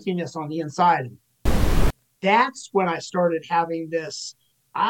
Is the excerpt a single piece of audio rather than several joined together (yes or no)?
no